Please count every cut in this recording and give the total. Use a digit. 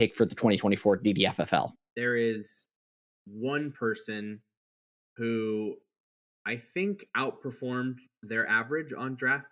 1